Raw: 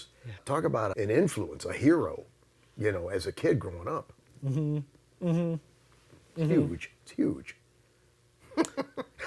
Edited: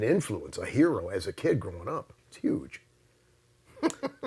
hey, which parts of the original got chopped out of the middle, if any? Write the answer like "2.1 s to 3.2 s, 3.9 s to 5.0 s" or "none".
2.1 s to 3.0 s, 4.2 s to 7.0 s